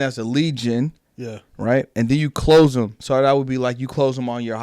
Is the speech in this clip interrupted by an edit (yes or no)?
yes